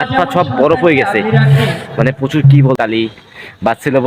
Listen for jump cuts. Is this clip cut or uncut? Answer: cut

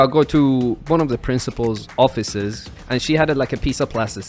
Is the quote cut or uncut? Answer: cut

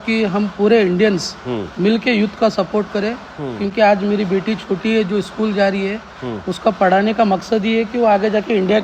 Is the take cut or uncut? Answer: uncut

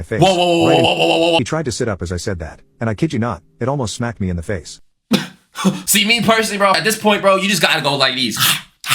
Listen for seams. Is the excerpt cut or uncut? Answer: cut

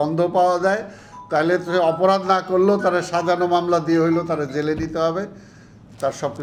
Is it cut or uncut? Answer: uncut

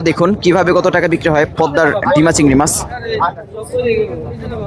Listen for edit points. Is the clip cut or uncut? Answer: uncut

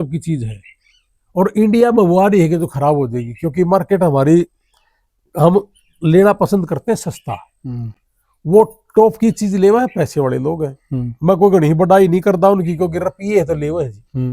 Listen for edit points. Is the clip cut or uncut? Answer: uncut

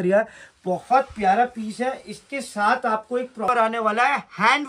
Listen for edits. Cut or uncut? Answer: cut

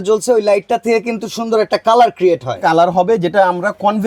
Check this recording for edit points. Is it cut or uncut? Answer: uncut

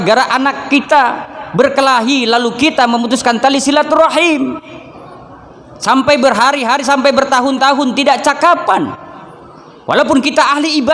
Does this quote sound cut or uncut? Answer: uncut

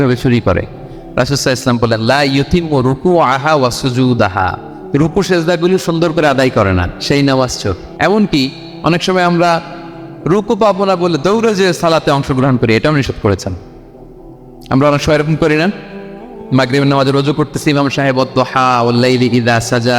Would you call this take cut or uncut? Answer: cut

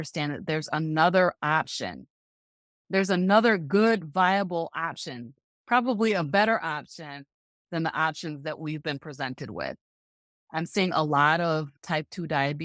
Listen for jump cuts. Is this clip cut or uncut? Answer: cut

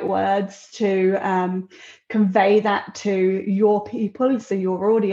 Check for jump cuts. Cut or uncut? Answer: uncut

